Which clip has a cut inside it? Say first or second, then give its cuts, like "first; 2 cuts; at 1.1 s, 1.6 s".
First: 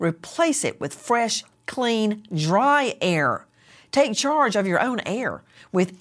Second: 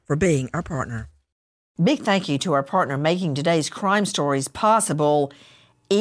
second; 1 cut; at 1.5 s